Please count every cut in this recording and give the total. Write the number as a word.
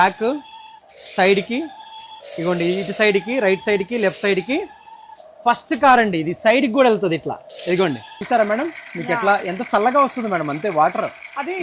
one